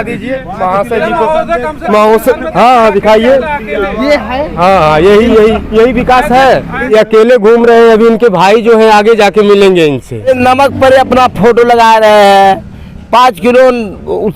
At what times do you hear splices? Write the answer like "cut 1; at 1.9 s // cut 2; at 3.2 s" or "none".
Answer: cut 1; at 6.8 s // cut 2; at 10.3 s